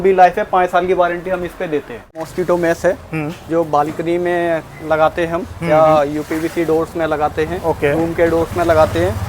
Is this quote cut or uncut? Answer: cut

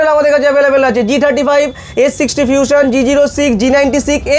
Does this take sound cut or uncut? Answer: uncut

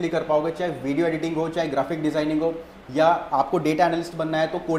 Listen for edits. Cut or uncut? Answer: uncut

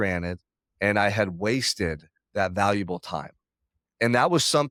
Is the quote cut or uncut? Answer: uncut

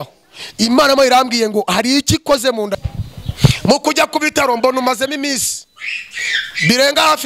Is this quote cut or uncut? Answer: cut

